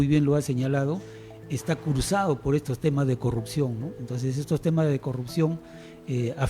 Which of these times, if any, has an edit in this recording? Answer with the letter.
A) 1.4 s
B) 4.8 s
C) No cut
C